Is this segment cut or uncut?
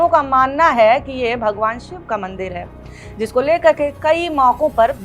uncut